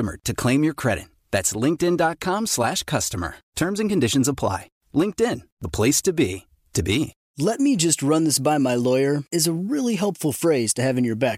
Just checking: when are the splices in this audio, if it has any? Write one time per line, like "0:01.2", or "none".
0:07.2